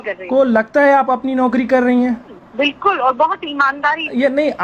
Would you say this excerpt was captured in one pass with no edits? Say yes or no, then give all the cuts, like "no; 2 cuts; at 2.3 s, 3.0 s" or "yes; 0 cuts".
no; 1 cut; at 2.4 s